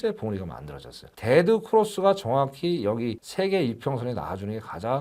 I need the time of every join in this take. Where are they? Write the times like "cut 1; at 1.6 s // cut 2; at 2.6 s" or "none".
cut 1; at 1.0 s